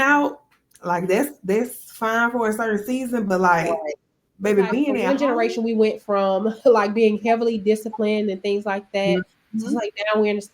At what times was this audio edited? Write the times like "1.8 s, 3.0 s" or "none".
5.0 s